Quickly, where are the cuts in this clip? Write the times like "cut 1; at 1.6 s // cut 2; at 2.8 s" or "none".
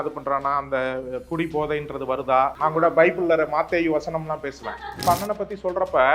cut 1; at 2.5 s // cut 2; at 5.0 s

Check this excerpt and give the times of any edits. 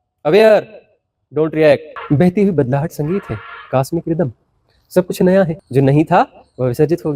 cut 1; at 1.9 s // cut 2; at 5.6 s

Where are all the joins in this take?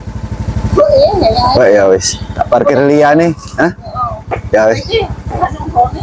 cut 1; at 1.5 s

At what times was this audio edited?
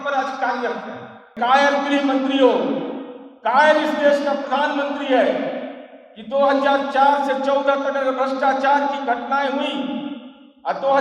cut 1; at 1.3 s

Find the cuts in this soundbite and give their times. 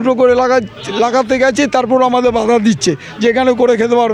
none

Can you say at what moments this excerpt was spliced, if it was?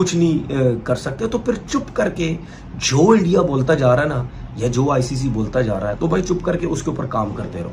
none

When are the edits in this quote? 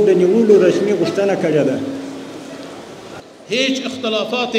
cut 1; at 3.2 s

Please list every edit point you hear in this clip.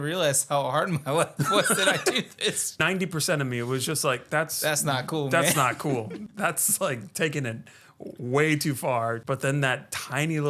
cut 1; at 2.8 s // cut 2; at 6.2 s // cut 3; at 9.2 s

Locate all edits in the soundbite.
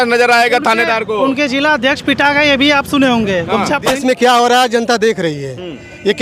cut 1; at 3.9 s

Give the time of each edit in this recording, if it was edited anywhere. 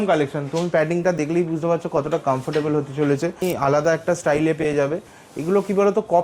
cut 1; at 3.4 s

